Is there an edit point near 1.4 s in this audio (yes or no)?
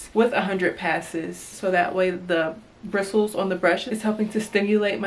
yes